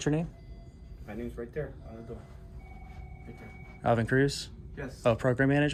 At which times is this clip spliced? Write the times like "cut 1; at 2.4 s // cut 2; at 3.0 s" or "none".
none

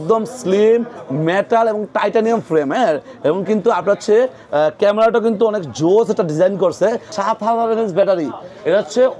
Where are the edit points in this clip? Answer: cut 1; at 7.1 s

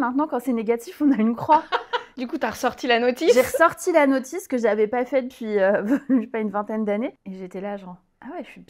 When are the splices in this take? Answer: cut 1; at 2.1 s // cut 2; at 7.2 s

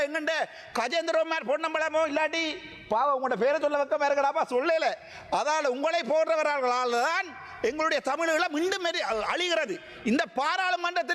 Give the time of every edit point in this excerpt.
none

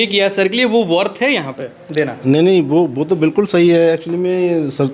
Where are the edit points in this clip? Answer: none

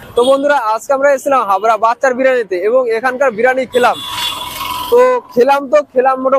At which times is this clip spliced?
none

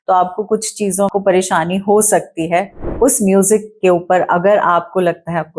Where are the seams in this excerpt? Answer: cut 1; at 1.1 s // cut 2; at 2.8 s

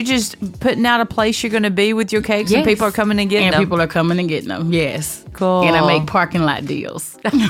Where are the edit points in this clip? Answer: cut 1; at 5.3 s

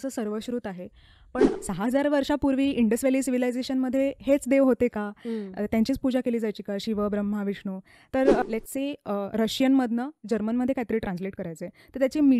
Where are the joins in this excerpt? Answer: cut 1; at 1.5 s // cut 2; at 8.4 s

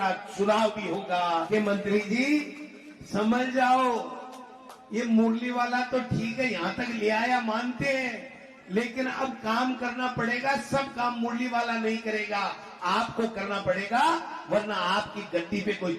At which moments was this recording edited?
cut 1; at 1.5 s

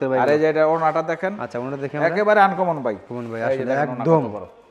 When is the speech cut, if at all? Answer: cut 1; at 3.2 s

